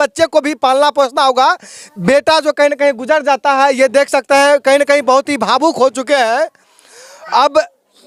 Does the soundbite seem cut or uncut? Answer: uncut